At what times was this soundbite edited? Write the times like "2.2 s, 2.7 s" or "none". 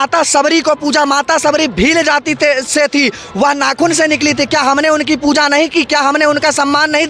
none